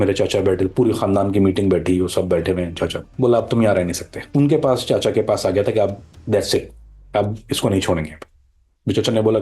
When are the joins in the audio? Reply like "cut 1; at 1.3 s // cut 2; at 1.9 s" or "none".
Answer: cut 1; at 3.0 s